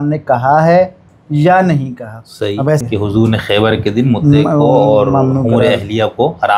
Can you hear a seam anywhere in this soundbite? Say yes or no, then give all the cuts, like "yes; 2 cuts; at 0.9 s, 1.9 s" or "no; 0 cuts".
yes; 1 cut; at 2.8 s